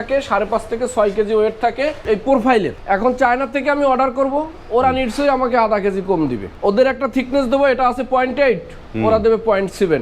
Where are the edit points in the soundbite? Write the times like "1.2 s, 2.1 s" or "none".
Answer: 2.0 s, 2.8 s, 6.5 s

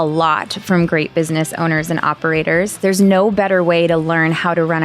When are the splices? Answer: 2.7 s

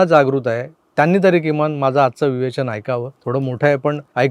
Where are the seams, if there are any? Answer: none

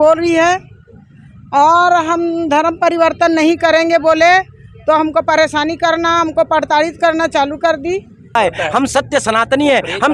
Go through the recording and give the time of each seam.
8.4 s

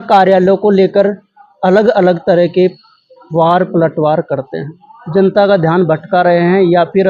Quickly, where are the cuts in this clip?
5.3 s

